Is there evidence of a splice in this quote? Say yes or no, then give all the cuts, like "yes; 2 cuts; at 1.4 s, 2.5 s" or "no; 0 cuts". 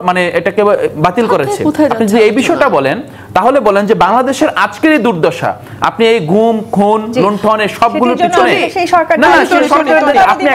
no; 0 cuts